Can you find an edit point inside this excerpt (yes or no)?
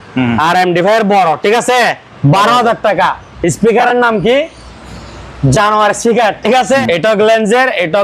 yes